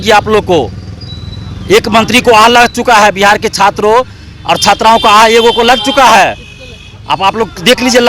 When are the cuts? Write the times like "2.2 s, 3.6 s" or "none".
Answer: none

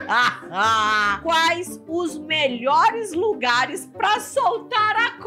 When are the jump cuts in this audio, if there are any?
none

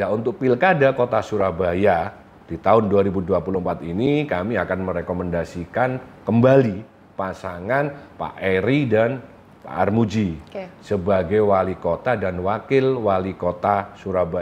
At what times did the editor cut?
none

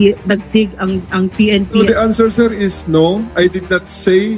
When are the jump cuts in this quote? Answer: 1.8 s

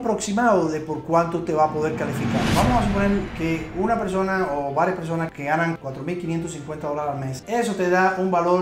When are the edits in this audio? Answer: 2.5 s, 7.4 s

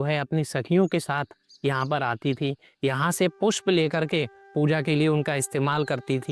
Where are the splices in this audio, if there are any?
none

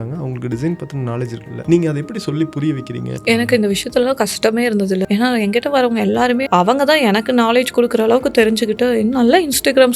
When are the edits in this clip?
1.5 s, 3.1 s, 5.0 s, 6.5 s

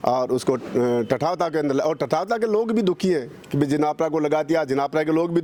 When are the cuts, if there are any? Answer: none

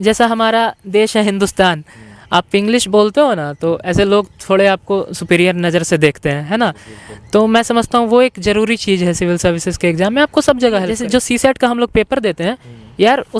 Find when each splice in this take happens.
10.9 s

